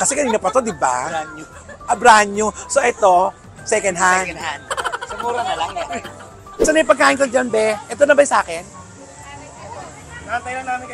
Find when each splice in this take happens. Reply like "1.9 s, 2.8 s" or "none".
6.6 s

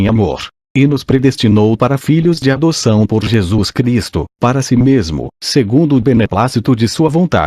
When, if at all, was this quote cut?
2.9 s

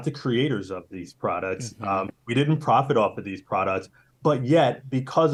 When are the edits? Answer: none

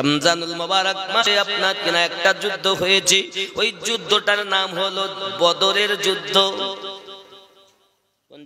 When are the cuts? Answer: 1.3 s

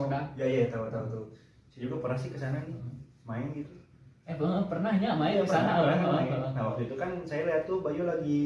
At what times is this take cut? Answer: none

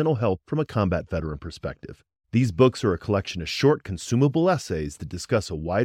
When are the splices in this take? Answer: none

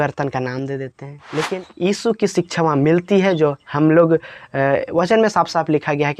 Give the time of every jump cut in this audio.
1.5 s

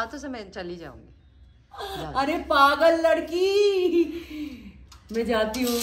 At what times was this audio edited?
1.5 s

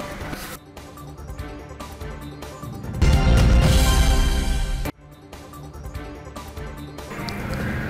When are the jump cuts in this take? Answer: none

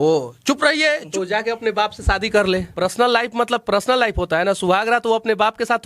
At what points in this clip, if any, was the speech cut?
1.1 s, 2.7 s

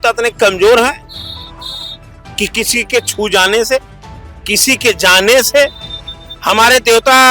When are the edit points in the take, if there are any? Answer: none

